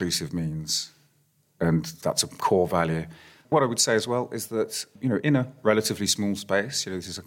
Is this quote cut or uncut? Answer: cut